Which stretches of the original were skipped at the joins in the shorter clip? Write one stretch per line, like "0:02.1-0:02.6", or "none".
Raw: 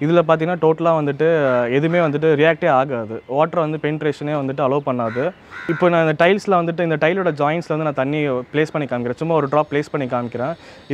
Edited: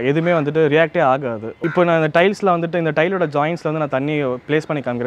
0:03.1-0:05.5